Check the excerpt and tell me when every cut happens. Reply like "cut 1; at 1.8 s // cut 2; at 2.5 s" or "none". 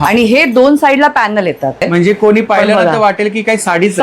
cut 1; at 1.8 s